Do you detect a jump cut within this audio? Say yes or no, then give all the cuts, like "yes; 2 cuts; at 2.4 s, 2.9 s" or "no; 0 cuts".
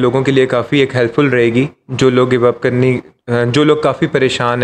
no; 0 cuts